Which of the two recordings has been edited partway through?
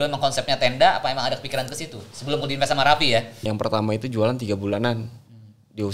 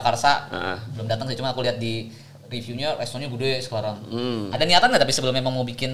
first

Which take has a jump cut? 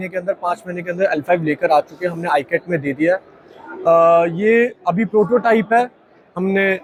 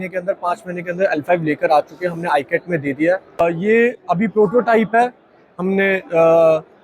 second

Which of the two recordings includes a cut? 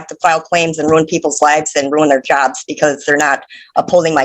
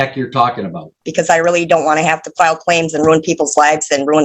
second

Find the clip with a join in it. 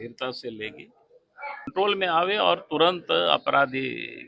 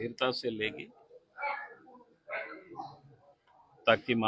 first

